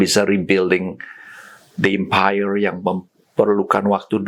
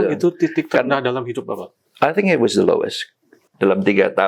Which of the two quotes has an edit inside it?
second; 1 cut; at 3.3 s

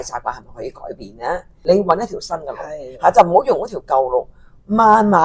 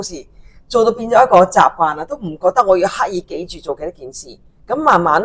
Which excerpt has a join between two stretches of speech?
first; 1 cut; at 1.5 s

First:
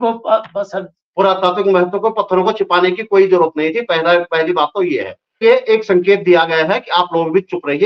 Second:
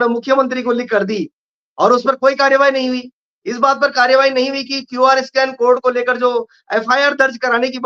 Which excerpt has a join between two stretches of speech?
first; 2 cuts; at 1.0 s, 5.4 s

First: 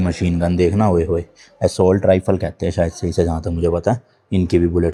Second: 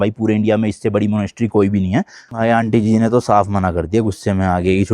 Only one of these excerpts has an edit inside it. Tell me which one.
second; 1 cut; at 2.2 s

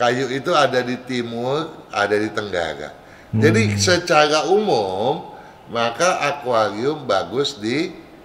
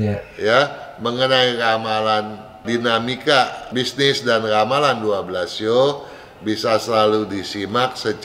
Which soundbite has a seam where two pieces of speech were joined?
second; 2 cuts; at 2.6 s, 3.6 s

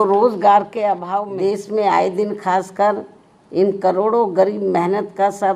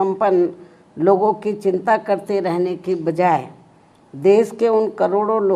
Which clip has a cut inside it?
first; 1 cut; at 1.1 s

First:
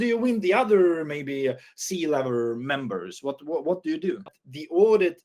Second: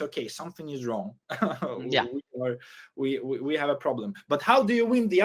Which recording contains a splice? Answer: first; 1 cut; at 4.2 s

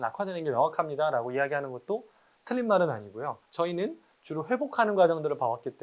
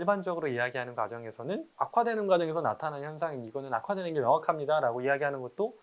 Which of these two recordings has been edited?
first; 1 cut; at 3.4 s

